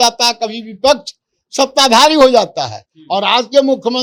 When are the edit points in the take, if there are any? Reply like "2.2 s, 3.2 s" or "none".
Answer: none